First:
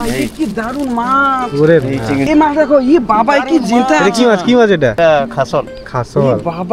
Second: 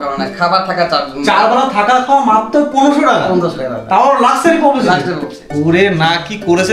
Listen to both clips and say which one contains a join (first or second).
first